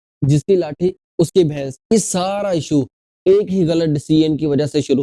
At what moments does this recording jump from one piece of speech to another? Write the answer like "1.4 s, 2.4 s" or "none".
1.9 s

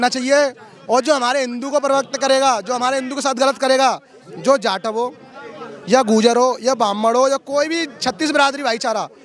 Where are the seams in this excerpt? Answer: none

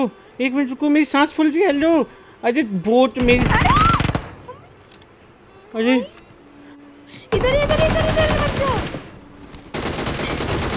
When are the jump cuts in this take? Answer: 6.7 s

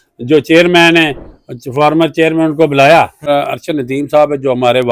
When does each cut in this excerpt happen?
3.3 s

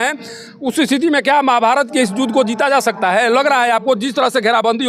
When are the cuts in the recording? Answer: none

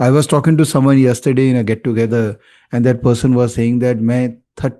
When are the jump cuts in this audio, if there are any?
none

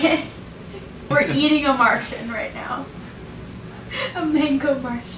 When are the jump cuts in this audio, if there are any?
1.1 s

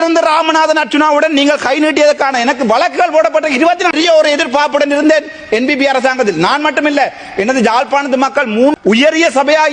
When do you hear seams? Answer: 3.9 s, 8.8 s

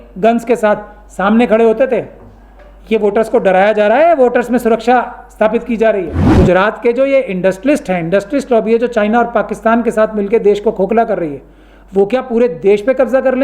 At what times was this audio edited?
6.2 s

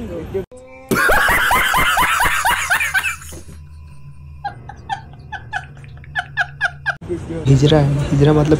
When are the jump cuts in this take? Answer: 7.5 s

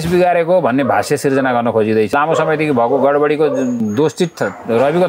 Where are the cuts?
2.1 s, 3.8 s

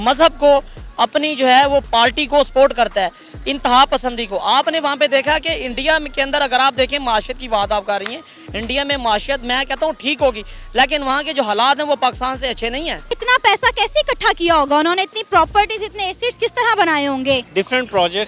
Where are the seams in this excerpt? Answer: 13.2 s, 17.5 s

